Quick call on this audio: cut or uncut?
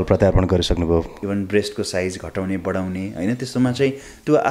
cut